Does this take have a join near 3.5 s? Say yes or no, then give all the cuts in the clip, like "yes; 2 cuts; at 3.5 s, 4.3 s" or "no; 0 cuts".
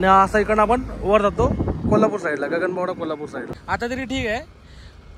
yes; 1 cut; at 3.5 s